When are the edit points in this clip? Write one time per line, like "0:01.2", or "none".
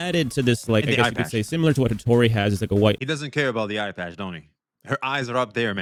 none